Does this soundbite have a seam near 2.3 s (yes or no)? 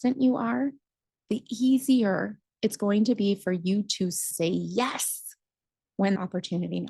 no